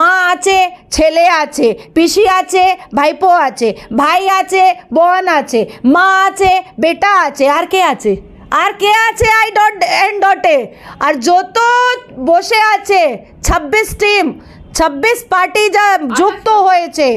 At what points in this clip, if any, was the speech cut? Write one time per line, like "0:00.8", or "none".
none